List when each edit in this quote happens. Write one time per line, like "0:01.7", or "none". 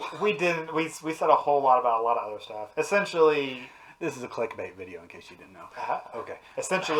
none